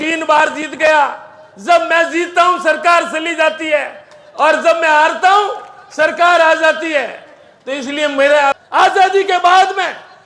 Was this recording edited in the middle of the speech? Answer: yes; 1 cut; at 8.5 s

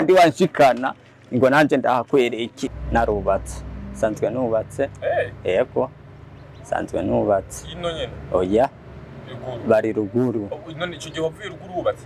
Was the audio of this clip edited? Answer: yes; 1 cut; at 2.8 s

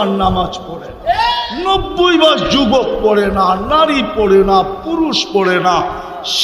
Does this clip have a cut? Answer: yes; 1 cut; at 1.5 s

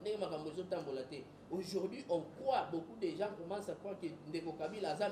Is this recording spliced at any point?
no; 0 cuts

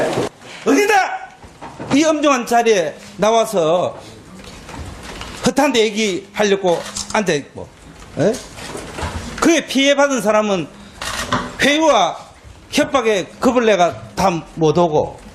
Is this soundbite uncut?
yes; 0 cuts

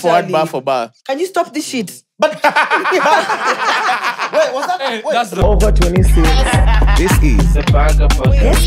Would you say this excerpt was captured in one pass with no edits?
no; 1 cut; at 5.4 s

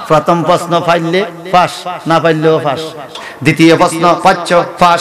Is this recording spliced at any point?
yes; 1 cut; at 3.1 s

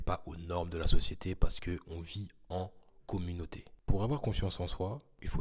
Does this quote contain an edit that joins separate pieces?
yes; 1 cut; at 3.6 s

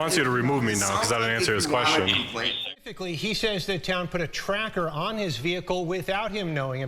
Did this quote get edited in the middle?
yes; 1 cut; at 2.7 s

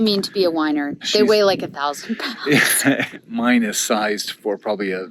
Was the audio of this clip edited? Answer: yes; 2 cuts; at 1.0 s, 3.0 s

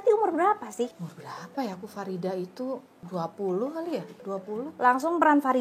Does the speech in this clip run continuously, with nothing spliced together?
no; 2 cuts; at 1.1 s, 3.0 s

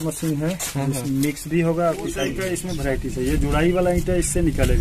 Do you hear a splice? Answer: yes; 1 cut; at 2.4 s

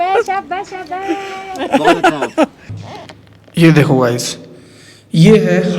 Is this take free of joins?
no; 1 cut; at 2.7 s

